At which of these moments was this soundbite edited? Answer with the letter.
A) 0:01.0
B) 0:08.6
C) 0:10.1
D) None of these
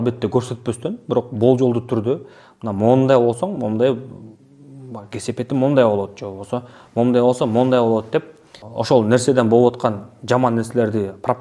D